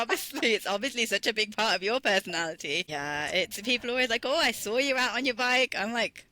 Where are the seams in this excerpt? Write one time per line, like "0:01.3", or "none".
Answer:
0:02.9